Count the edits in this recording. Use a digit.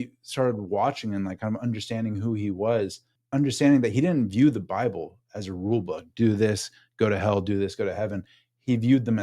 1